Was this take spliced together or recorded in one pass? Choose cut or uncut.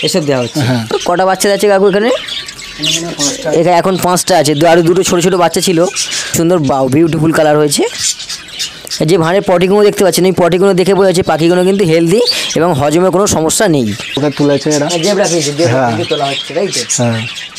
cut